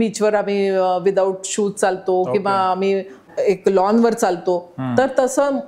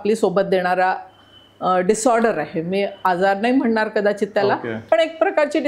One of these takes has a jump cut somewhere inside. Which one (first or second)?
first